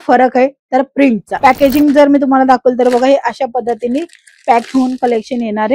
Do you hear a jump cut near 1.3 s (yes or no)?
yes